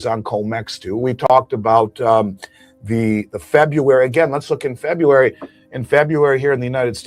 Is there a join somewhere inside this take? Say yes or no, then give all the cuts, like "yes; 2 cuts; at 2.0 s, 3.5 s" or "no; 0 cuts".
no; 0 cuts